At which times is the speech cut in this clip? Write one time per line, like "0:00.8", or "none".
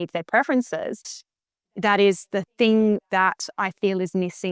0:01.2